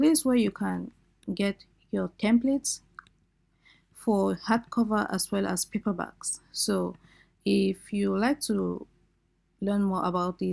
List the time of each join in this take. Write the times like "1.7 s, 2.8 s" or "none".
none